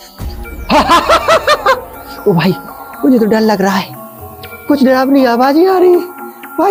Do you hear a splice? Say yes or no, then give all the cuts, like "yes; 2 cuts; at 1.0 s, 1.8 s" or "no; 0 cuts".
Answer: no; 0 cuts